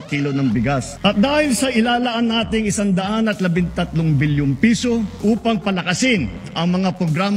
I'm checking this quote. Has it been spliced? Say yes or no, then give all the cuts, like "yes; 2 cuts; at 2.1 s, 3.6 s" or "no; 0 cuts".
yes; 1 cut; at 0.9 s